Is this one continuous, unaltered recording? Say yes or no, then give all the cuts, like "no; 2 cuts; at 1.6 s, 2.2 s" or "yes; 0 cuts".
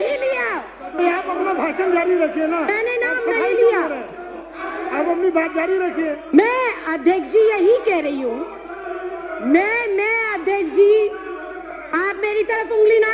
yes; 0 cuts